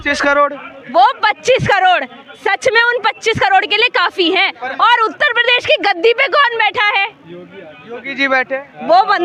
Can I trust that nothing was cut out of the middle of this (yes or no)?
yes